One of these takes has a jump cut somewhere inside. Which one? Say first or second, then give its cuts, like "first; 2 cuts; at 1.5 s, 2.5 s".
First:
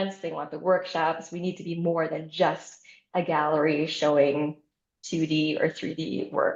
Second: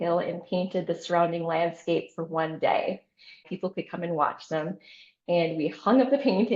second; 1 cut; at 3.5 s